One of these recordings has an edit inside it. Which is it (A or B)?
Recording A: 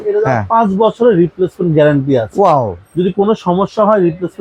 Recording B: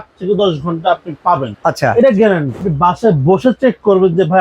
B